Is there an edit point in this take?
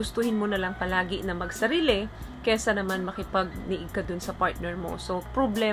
no; 0 cuts

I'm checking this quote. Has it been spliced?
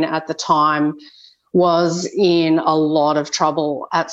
no; 0 cuts

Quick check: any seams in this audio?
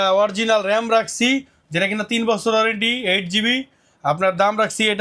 no; 0 cuts

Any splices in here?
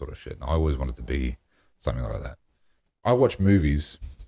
yes; 1 cut; at 3.0 s

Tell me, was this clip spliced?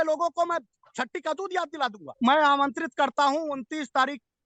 yes; 1 cut; at 2.0 s

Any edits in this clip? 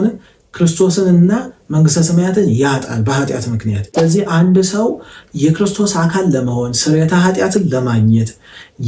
yes; 1 cut; at 3.8 s

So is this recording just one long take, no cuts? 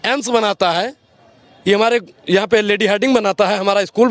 yes; 0 cuts

